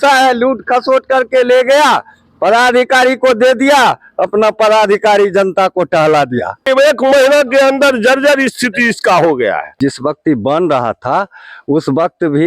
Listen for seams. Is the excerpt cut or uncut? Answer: cut